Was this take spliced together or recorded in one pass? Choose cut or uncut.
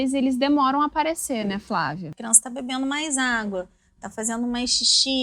cut